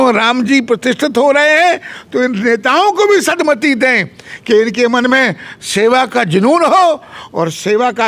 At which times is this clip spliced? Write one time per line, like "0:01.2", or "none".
none